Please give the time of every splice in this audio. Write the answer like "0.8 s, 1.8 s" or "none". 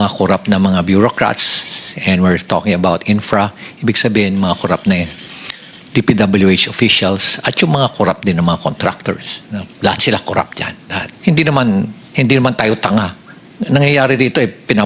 11.0 s